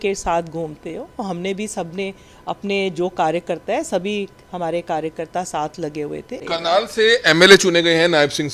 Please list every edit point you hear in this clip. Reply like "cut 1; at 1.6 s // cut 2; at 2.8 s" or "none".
cut 1; at 2.3 s // cut 2; at 6.4 s